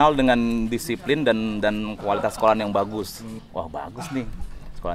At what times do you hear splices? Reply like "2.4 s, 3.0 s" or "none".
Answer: 3.4 s